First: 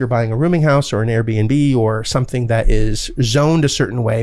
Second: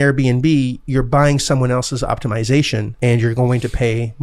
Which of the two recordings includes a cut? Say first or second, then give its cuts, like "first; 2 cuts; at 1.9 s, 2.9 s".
second; 1 cut; at 2.9 s